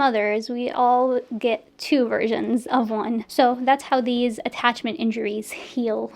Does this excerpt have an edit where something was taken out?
yes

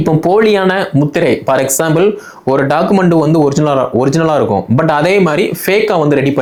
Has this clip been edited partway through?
no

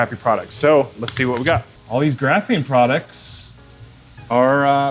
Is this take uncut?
no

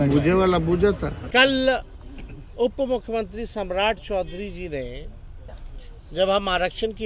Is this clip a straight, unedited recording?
no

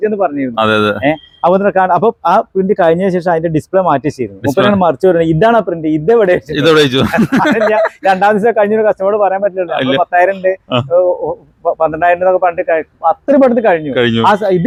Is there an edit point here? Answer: no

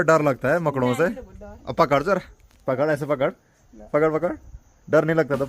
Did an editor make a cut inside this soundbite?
no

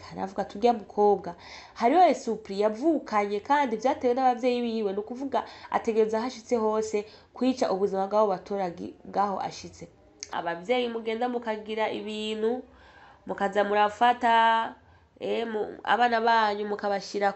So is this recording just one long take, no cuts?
no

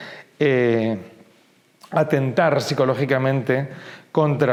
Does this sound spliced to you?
no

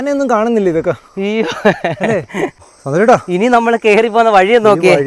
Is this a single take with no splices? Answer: yes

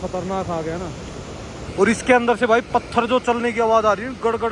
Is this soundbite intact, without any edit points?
yes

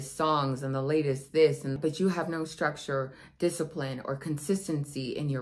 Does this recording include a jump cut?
yes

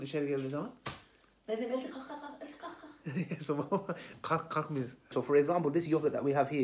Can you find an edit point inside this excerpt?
yes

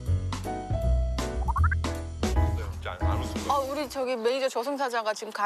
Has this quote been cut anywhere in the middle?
no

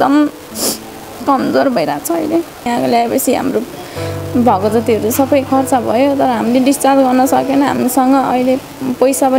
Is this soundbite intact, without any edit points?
no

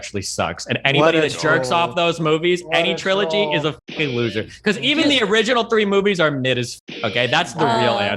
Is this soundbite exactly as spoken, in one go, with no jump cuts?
no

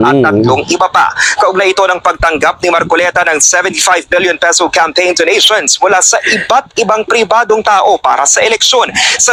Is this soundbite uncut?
yes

